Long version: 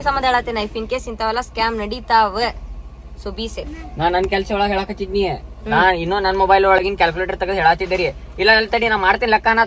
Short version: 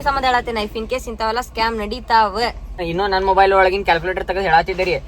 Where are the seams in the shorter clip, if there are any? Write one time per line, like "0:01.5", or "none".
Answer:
0:02.9